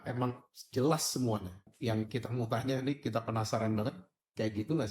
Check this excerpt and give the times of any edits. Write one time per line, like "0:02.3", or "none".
0:01.7